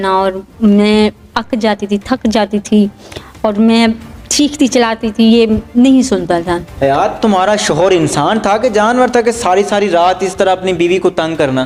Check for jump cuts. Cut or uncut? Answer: uncut